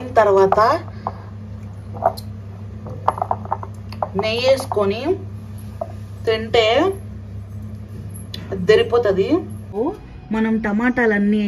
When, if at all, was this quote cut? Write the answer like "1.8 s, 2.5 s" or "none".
9.8 s